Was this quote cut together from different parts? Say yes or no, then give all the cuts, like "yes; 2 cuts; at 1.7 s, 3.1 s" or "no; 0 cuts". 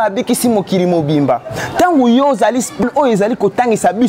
yes; 1 cut; at 2.8 s